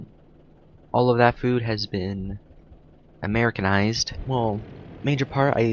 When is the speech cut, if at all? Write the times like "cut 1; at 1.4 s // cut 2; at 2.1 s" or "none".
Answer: none